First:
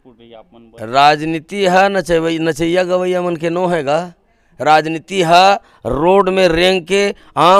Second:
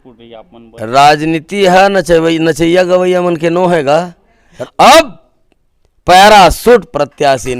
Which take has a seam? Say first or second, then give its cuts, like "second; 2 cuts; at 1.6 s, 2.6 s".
second; 1 cut; at 4.5 s